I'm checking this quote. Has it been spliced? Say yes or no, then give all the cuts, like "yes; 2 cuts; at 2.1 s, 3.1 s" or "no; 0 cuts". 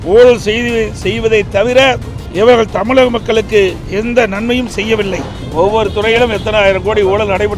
yes; 2 cuts; at 3.8 s, 5.4 s